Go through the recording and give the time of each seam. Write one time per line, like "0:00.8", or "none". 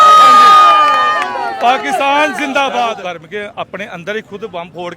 0:03.0

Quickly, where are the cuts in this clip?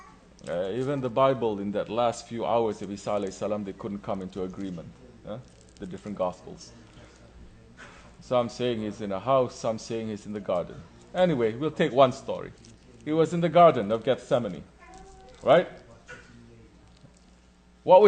0:03.4

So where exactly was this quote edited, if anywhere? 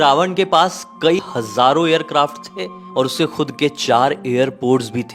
0:01.2

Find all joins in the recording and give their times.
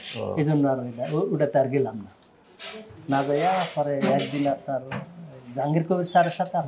none

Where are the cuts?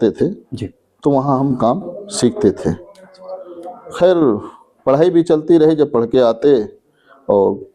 none

